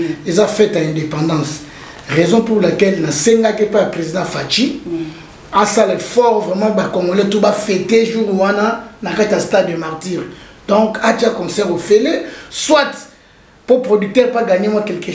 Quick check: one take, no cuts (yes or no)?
yes